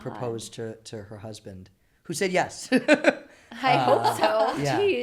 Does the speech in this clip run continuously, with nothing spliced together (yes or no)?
yes